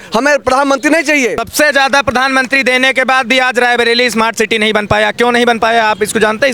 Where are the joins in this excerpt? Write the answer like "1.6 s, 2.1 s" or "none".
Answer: 1.4 s